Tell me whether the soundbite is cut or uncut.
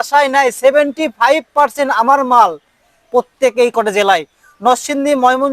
uncut